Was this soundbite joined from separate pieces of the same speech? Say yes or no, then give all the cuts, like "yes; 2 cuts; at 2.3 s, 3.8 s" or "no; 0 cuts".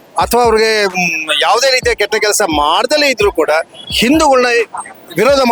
no; 0 cuts